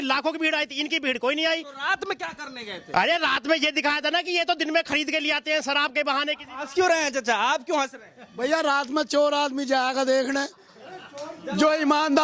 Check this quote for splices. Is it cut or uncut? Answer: uncut